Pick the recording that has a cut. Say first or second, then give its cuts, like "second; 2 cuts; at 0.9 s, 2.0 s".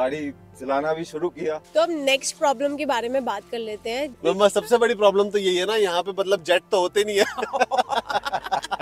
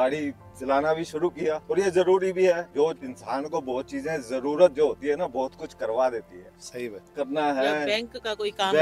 first; 2 cuts; at 1.6 s, 4.2 s